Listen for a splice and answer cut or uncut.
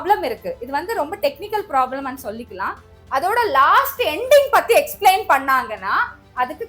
cut